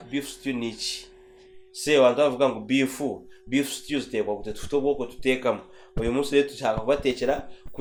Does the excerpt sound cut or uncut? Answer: uncut